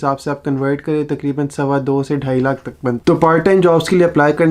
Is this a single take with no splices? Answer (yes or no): no